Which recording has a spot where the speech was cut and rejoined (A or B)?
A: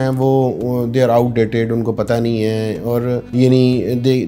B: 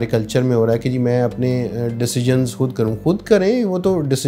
A